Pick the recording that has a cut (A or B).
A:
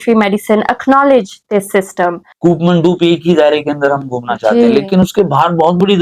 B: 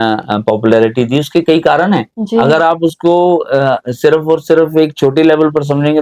A